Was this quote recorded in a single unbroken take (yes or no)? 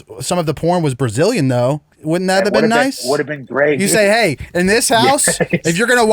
no